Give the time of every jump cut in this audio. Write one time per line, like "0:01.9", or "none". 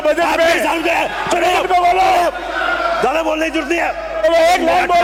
none